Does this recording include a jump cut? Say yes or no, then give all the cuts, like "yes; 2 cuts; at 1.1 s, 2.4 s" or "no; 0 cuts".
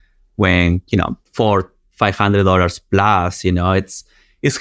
yes; 1 cut; at 1.2 s